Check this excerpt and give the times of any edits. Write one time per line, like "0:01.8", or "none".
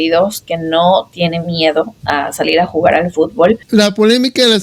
0:03.6